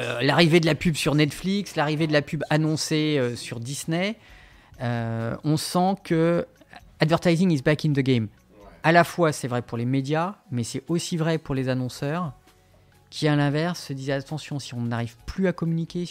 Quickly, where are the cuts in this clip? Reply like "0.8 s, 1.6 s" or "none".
6.6 s